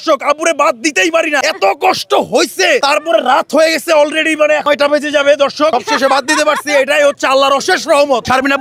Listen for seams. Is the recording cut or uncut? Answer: uncut